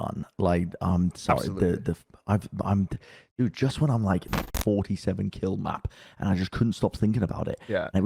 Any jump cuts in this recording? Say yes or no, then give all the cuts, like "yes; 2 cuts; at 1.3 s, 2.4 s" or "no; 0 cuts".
yes; 1 cut; at 4.4 s